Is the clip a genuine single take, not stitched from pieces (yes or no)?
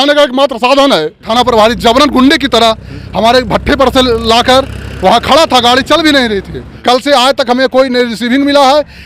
no